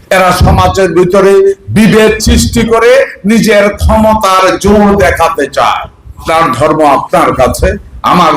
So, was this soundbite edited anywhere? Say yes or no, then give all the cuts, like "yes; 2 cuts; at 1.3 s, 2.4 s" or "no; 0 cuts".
yes; 1 cut; at 6.2 s